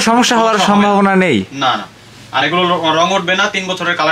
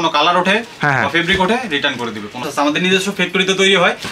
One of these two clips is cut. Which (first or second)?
second